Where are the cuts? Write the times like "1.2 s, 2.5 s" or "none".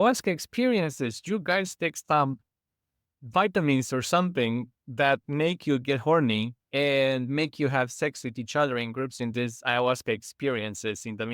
9.2 s